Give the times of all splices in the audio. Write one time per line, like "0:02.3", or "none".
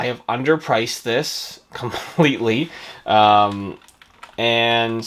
none